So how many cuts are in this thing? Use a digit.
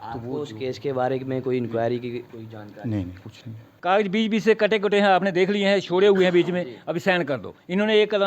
1